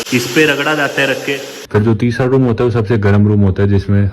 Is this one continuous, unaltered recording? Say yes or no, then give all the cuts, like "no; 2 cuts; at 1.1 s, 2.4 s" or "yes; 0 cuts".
no; 1 cut; at 1.5 s